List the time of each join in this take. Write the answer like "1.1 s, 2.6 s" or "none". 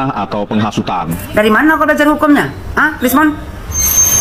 1.1 s